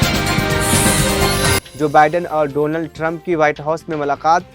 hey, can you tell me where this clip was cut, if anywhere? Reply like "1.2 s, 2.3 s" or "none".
1.6 s